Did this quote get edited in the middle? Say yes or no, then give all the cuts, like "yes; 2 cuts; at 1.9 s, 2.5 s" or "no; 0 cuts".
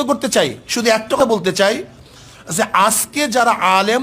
yes; 1 cut; at 1.2 s